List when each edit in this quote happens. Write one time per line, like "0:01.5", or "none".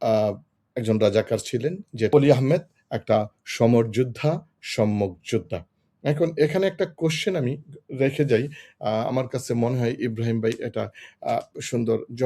0:02.1